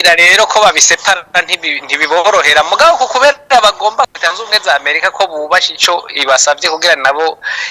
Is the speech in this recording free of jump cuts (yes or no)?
no